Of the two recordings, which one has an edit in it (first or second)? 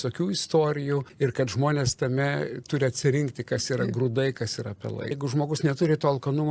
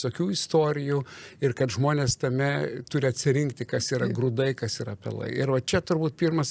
first